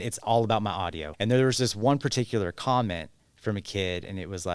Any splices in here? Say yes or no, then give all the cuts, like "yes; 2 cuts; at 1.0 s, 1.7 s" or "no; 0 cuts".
yes; 1 cut; at 1.1 s